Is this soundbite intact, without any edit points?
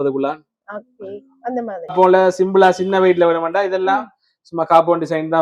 no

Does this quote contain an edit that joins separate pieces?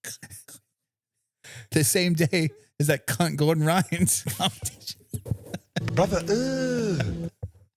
no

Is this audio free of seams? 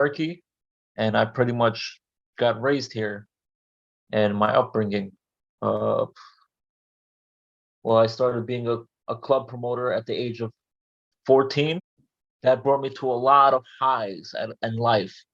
no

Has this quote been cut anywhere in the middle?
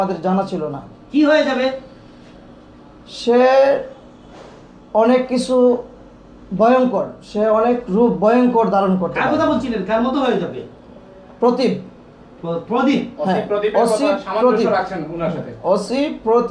no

